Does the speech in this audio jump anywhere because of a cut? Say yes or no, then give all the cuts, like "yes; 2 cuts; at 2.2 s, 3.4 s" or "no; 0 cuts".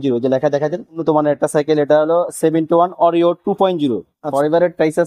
yes; 2 cuts; at 1.0 s, 4.3 s